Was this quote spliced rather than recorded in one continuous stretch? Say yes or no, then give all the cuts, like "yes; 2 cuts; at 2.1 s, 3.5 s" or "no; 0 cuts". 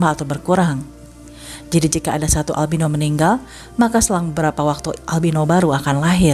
no; 0 cuts